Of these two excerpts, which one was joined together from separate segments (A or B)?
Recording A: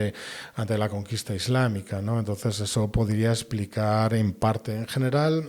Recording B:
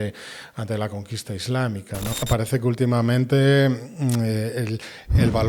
B